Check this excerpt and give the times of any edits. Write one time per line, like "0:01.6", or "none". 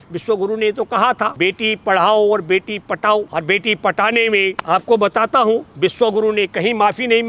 0:01.3
0:03.3
0:04.6